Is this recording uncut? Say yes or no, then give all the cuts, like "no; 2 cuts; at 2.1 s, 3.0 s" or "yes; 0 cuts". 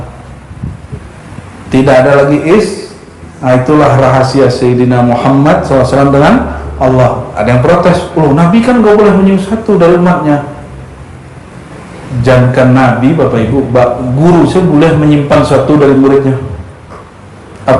yes; 0 cuts